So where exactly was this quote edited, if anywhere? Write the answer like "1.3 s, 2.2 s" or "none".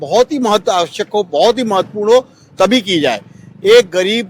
none